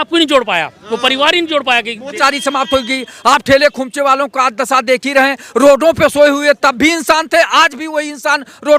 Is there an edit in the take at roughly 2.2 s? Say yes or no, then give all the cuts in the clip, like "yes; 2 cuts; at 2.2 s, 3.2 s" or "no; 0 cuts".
yes; 1 cut; at 2.2 s